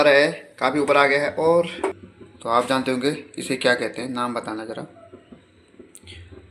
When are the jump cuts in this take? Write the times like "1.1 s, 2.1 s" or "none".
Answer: 2.0 s